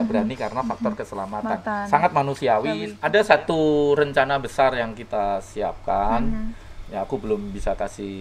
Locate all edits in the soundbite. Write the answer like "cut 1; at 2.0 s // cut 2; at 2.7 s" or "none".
cut 1; at 2.9 s